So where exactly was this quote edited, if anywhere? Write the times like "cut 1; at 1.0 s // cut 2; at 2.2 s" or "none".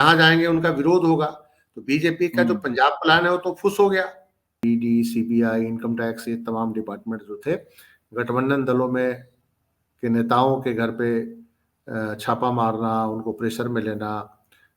cut 1; at 4.5 s